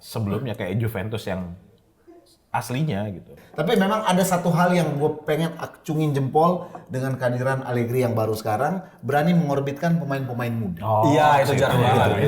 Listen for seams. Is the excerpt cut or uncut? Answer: cut